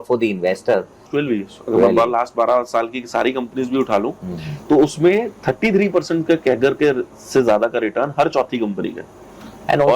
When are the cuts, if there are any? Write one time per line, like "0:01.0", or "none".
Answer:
0:01.1